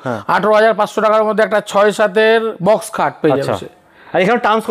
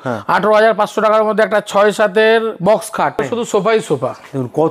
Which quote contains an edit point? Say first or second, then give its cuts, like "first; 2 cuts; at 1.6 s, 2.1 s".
second; 1 cut; at 3.2 s